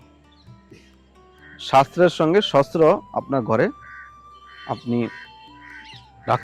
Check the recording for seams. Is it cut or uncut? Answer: uncut